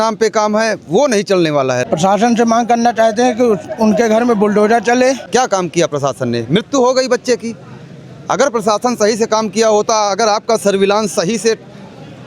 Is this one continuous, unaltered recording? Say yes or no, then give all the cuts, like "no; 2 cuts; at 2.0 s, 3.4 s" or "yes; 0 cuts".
no; 2 cuts; at 1.8 s, 5.2 s